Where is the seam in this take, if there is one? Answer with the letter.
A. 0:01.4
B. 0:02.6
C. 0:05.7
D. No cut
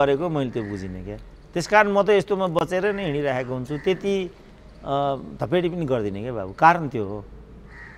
D